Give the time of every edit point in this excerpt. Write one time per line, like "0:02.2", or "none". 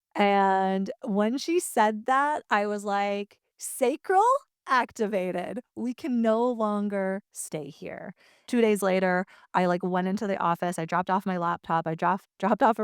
0:08.3